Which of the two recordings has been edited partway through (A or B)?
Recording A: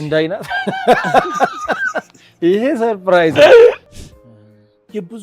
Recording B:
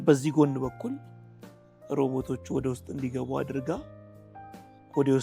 A